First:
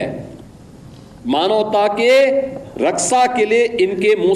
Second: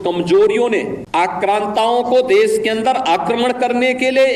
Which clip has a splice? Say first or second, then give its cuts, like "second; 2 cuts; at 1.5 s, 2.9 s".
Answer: second; 1 cut; at 1.0 s